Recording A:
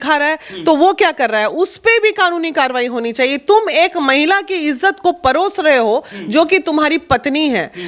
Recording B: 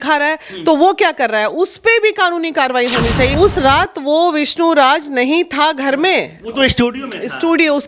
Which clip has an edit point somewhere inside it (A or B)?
B